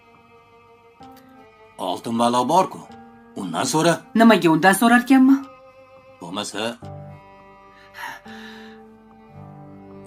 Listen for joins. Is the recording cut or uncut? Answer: cut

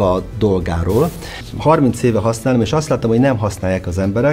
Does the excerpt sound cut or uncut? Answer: cut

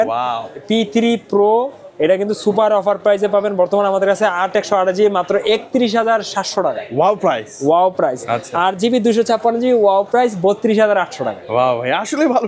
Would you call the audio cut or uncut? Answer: uncut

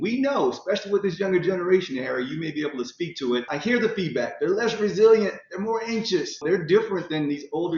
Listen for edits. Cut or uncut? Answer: cut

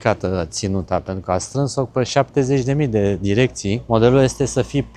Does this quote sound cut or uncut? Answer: cut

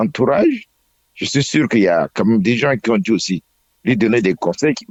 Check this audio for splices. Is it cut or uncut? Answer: uncut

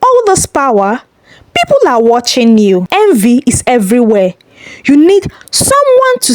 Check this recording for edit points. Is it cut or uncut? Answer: cut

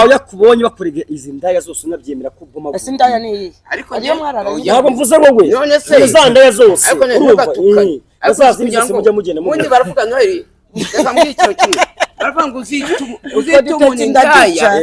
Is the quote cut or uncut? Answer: uncut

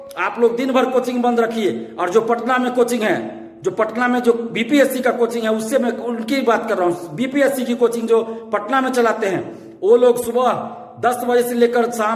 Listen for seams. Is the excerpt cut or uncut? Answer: uncut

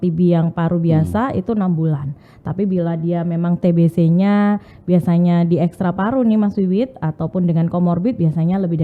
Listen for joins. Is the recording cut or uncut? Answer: uncut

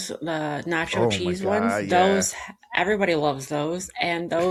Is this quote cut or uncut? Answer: uncut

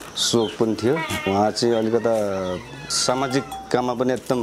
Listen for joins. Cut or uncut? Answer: cut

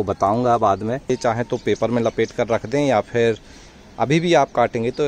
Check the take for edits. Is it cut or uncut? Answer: cut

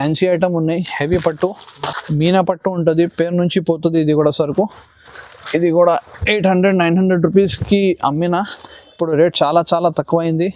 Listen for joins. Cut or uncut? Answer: uncut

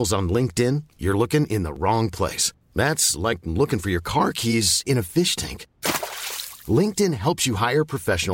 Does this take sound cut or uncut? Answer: uncut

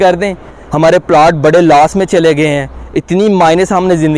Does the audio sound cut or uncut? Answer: uncut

